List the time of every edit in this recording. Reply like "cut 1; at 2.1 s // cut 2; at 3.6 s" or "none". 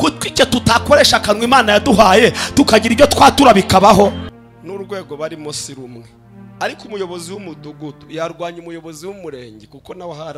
cut 1; at 4.3 s